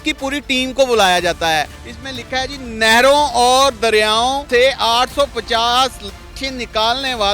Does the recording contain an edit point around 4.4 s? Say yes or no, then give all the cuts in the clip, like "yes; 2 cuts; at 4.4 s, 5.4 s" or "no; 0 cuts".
yes; 2 cuts; at 1.8 s, 4.4 s